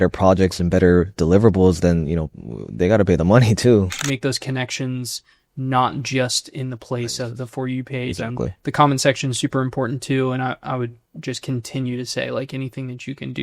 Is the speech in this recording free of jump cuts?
no; 2 cuts; at 4.0 s, 11.1 s

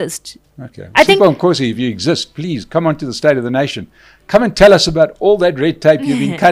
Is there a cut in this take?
no; 0 cuts

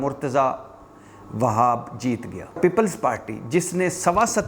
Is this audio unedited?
no; 1 cut; at 2.6 s

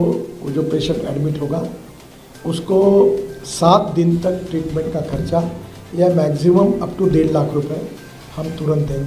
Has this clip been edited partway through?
no; 0 cuts

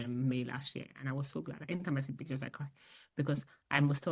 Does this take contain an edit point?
yes; 1 cut; at 1.6 s

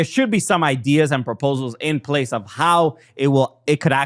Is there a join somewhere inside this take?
no; 0 cuts

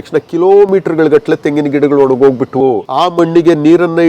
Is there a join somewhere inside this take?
yes; 1 cut; at 2.6 s

